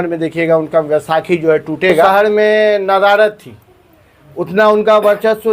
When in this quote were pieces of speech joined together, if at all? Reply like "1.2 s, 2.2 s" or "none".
2.0 s

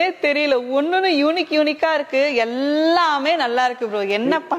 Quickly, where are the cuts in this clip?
none

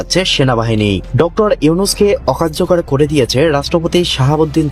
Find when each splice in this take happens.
none

